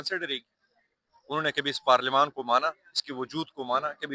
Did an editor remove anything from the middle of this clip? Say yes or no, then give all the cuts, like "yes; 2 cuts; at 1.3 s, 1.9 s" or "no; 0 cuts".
no; 0 cuts